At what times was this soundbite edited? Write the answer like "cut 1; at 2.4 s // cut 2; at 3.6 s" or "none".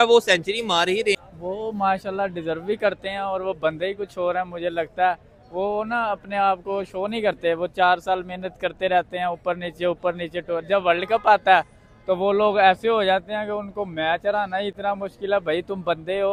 none